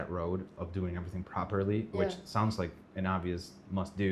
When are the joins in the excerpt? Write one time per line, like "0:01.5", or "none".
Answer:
none